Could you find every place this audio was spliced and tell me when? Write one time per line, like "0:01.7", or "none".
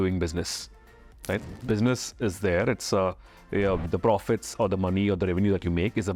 none